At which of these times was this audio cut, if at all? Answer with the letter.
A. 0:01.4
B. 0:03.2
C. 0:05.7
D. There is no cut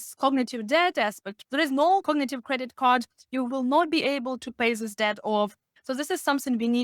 C